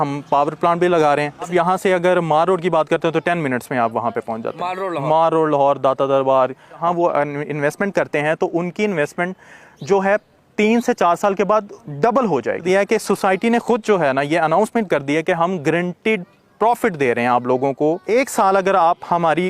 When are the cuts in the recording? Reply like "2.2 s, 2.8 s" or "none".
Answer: 1.5 s, 6.8 s, 12.6 s, 18.0 s